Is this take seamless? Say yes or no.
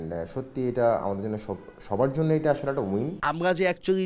no